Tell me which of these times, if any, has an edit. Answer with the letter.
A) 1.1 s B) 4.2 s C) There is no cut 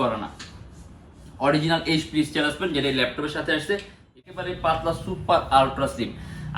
B